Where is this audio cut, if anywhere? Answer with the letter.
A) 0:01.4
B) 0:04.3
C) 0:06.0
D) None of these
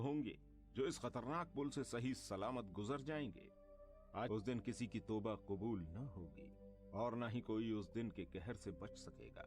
B